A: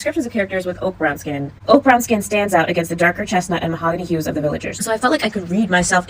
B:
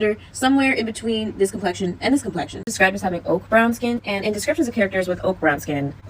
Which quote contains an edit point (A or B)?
B